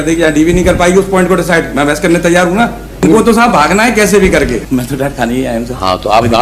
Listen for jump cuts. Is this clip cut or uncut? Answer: cut